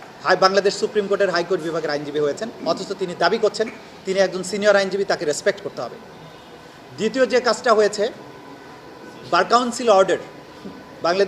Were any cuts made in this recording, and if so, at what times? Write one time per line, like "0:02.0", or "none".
none